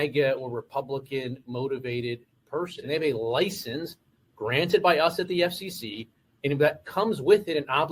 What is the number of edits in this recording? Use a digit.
1